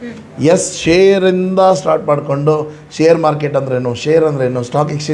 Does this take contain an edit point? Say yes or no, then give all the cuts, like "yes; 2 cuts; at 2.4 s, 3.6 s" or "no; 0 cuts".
no; 0 cuts